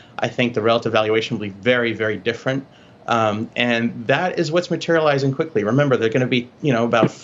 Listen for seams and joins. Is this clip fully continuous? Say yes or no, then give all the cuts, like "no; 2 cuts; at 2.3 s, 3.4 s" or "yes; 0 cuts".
yes; 0 cuts